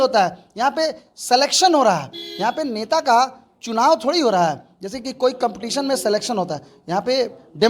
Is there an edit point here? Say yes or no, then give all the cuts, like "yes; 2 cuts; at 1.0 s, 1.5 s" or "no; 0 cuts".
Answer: no; 0 cuts